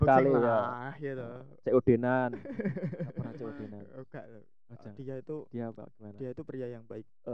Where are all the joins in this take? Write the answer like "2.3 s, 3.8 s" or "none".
3.3 s